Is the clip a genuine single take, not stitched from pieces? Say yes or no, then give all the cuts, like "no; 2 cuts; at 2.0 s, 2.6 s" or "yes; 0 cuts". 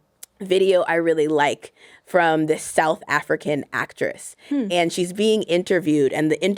yes; 0 cuts